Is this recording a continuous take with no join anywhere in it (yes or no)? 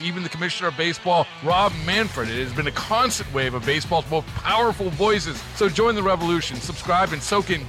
yes